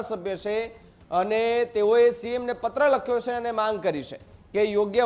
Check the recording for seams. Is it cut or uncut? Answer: uncut